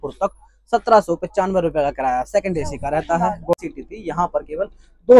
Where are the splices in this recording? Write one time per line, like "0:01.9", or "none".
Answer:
0:03.5